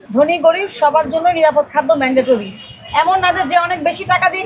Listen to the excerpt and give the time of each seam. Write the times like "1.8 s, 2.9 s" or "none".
none